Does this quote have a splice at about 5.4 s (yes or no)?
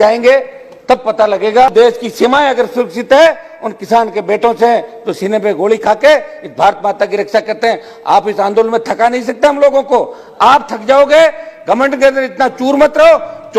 no